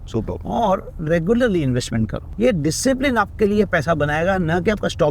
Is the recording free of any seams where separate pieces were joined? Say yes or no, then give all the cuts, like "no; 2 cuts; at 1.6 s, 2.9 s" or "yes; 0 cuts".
no; 1 cut; at 2.2 s